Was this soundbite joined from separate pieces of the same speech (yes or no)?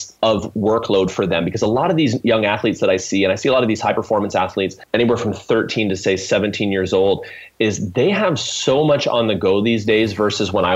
yes